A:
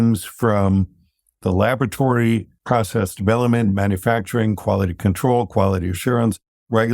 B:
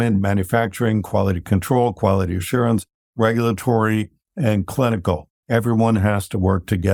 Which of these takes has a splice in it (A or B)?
A